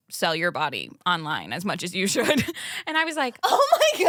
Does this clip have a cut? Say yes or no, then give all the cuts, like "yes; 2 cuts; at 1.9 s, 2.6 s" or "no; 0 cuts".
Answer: no; 0 cuts